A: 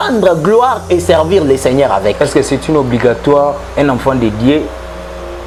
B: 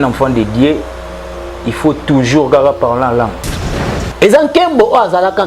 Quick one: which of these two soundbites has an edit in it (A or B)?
B